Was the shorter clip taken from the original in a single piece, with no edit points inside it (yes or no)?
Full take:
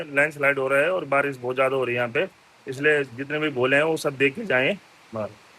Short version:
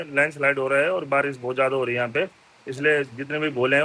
yes